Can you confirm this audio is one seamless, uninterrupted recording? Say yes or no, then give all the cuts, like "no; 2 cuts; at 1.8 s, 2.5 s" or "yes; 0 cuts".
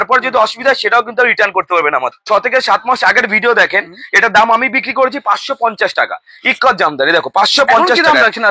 no; 1 cut; at 2.1 s